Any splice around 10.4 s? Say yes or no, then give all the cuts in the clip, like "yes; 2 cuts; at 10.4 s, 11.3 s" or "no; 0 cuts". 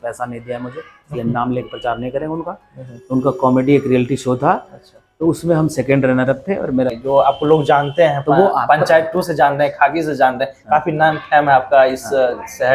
no; 1 cut; at 6.9 s